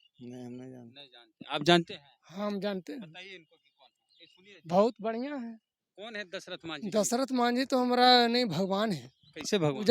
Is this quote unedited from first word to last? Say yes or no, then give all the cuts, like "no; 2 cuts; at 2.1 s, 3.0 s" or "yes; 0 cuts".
yes; 0 cuts